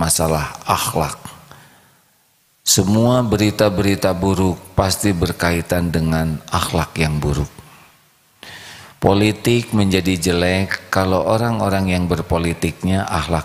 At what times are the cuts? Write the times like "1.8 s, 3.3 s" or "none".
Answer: none